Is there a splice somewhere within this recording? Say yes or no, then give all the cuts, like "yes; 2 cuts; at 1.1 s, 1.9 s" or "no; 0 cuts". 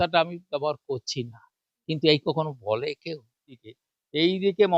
yes; 1 cut; at 3.7 s